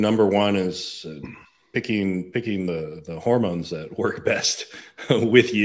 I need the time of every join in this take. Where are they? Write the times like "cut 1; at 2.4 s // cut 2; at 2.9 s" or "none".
none